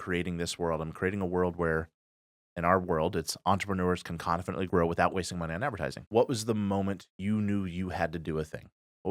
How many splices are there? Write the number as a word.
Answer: two